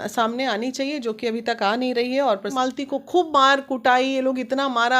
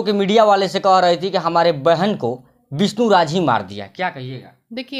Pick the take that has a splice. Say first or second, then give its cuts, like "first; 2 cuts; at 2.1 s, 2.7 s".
first; 1 cut; at 2.5 s